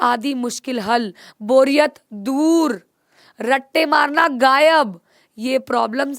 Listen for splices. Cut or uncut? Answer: uncut